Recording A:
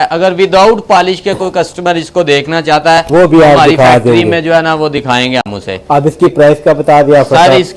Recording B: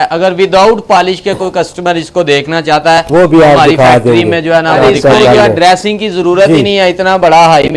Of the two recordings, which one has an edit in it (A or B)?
B